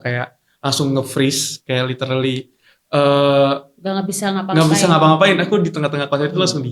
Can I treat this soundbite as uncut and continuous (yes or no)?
yes